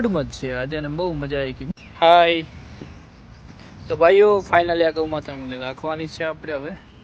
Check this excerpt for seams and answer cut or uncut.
cut